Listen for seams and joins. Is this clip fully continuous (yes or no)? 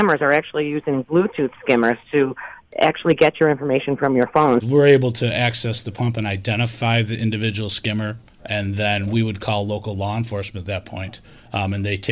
no